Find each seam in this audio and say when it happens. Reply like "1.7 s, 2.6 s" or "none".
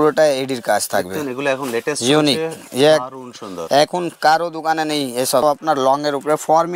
5.4 s